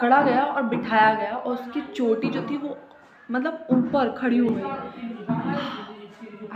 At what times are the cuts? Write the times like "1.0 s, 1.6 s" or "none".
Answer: none